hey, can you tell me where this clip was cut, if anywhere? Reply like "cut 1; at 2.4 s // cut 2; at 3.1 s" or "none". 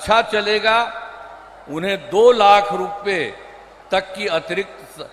none